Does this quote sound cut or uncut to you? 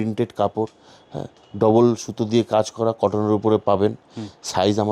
uncut